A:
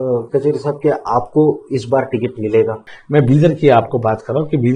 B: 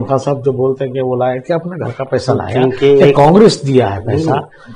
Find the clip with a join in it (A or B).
A